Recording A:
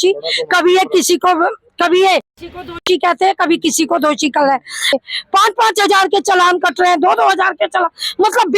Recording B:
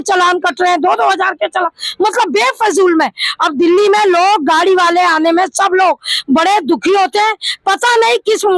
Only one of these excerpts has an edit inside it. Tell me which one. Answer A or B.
A